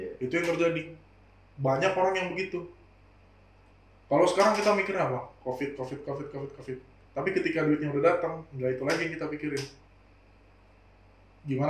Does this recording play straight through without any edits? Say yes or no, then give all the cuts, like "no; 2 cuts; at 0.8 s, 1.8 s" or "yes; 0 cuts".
yes; 0 cuts